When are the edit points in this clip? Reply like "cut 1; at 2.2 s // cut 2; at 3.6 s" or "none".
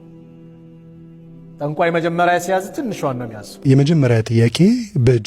cut 1; at 3.5 s